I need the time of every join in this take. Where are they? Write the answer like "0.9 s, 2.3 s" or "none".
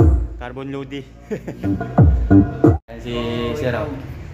2.8 s